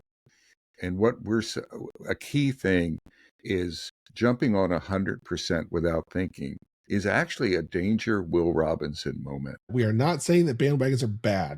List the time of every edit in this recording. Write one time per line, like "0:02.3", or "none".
0:09.7